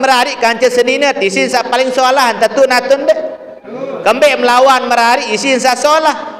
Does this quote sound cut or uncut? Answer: uncut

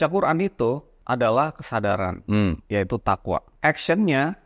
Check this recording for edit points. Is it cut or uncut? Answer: cut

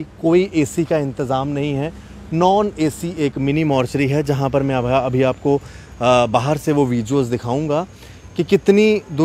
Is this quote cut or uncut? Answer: uncut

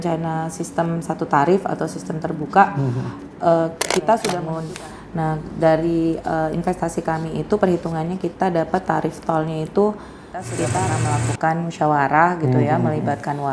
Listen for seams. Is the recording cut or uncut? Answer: cut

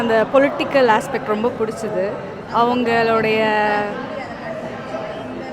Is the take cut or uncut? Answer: uncut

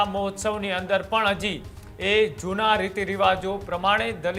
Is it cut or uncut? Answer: uncut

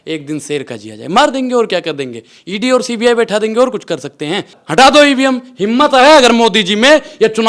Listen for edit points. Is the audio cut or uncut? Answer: cut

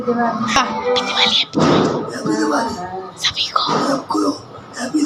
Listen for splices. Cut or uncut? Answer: uncut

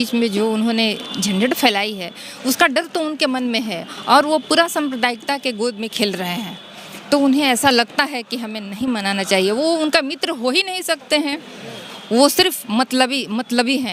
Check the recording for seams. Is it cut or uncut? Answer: uncut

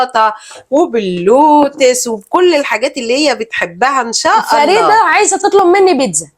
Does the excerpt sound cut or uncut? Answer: cut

